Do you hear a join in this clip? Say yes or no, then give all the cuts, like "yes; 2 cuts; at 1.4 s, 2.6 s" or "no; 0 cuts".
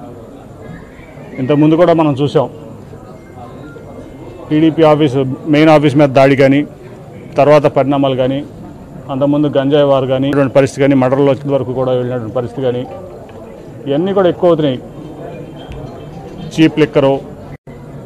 yes; 1 cut; at 10.3 s